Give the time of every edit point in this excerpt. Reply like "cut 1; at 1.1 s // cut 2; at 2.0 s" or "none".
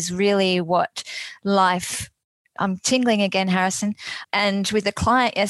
cut 1; at 4.1 s